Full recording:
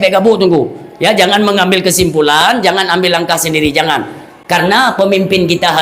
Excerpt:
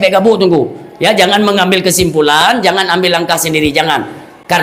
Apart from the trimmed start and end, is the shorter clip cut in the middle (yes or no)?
no